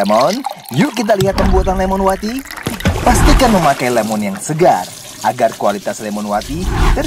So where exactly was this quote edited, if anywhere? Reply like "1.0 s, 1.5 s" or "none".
none